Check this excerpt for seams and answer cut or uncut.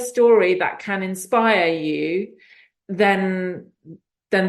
uncut